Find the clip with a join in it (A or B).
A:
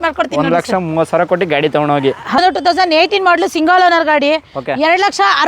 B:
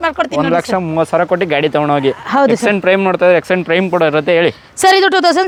A